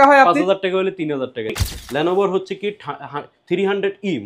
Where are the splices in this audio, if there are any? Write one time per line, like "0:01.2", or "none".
0:01.5